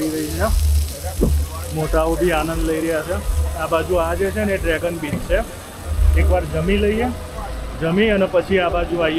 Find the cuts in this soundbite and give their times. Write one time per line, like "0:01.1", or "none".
none